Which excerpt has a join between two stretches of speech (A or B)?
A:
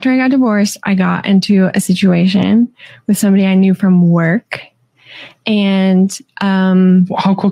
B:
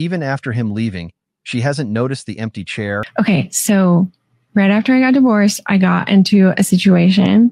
B